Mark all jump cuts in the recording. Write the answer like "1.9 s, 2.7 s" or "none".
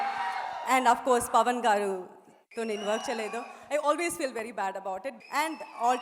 5.1 s